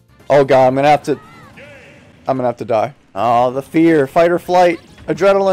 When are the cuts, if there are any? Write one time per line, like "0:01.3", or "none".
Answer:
0:03.0